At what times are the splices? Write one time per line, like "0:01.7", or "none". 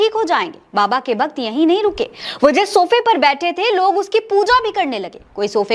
none